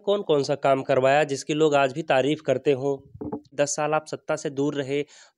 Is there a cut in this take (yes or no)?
yes